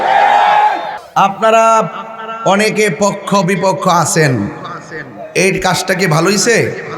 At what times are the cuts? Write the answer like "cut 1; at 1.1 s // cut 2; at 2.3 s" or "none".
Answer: cut 1; at 1.0 s